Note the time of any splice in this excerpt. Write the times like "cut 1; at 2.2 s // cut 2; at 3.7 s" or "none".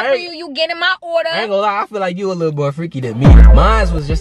none